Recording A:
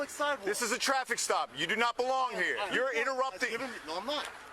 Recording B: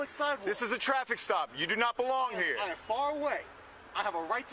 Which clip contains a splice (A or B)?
A